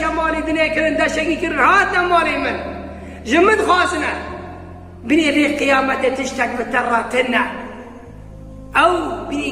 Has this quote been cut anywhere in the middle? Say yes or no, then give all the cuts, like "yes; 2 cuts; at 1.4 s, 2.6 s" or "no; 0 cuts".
no; 0 cuts